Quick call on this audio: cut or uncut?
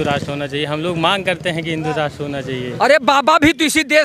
cut